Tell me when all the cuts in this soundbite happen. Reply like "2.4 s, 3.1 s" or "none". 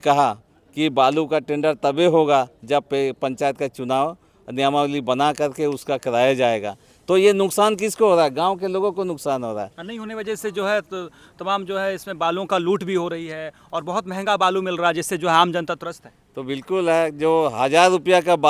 none